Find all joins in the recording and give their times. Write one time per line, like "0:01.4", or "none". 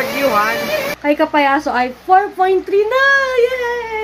0:00.9